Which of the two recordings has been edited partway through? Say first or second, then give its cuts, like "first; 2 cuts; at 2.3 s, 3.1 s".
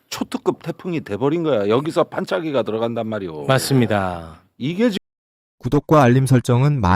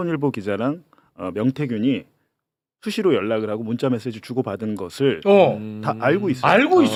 first; 1 cut; at 4.9 s